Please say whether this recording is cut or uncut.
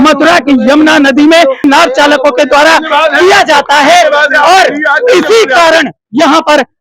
cut